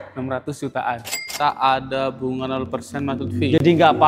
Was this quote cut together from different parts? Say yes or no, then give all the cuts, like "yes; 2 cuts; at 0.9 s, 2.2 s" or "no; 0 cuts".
yes; 1 cut; at 1.3 s